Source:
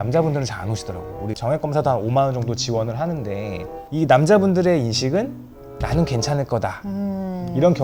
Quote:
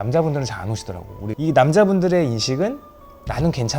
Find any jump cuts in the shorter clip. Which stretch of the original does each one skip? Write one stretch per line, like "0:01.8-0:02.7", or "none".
0:01.3-0:03.8